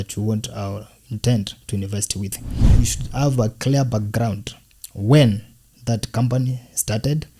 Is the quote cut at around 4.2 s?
no; 1 cut; at 2.8 s

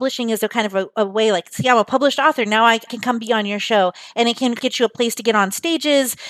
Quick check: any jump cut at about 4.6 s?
yes; 2 cuts; at 2.9 s, 4.6 s

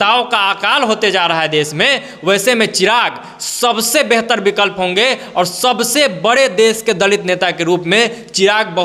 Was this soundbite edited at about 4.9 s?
no; 0 cuts

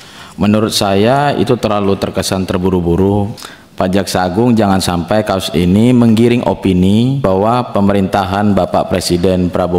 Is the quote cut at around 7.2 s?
yes; 2 cuts; at 3.3 s, 7.2 s

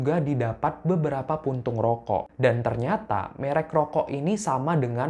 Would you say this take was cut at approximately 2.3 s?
yes; 1 cut; at 2.3 s

